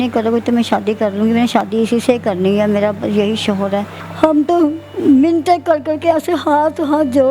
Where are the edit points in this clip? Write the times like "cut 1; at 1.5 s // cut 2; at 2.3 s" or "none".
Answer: cut 1; at 4.0 s